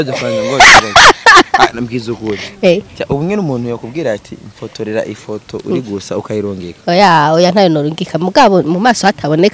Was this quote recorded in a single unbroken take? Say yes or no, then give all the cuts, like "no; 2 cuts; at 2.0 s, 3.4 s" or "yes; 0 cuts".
yes; 0 cuts